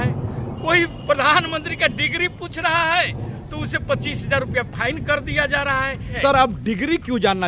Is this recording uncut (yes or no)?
no